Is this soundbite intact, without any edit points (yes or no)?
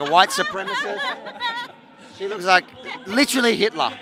yes